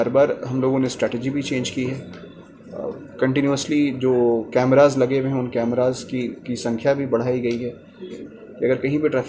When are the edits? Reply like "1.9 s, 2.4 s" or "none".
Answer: 8.2 s